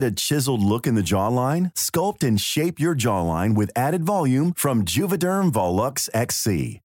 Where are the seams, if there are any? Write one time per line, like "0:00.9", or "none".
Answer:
none